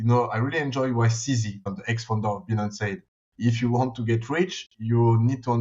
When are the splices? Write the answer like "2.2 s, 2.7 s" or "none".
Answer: 1.6 s